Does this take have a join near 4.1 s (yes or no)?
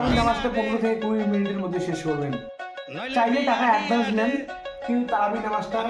no